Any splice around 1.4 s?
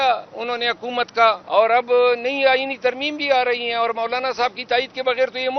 yes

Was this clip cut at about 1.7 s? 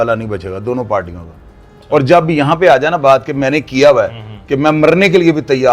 yes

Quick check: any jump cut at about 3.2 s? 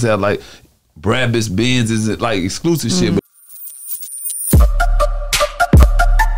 yes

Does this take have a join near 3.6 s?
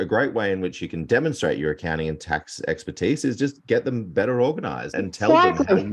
no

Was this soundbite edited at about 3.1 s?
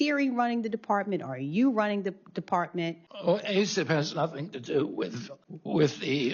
yes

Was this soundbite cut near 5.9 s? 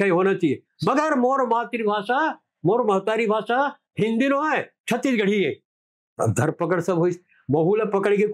yes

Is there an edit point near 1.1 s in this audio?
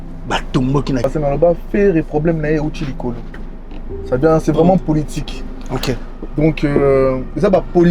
yes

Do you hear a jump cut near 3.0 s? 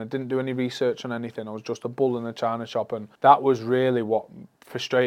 yes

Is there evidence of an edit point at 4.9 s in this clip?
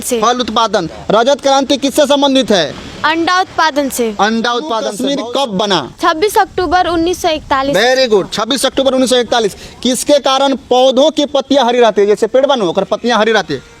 yes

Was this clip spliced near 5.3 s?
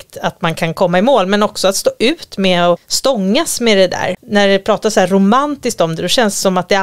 no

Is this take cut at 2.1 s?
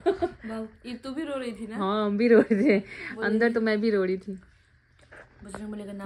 no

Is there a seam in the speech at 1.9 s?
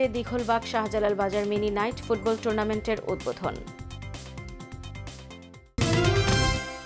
no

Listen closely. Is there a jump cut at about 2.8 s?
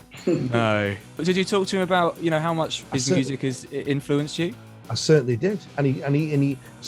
yes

